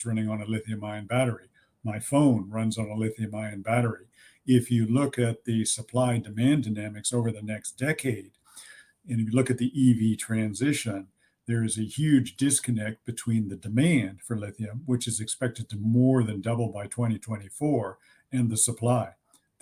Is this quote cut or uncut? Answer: uncut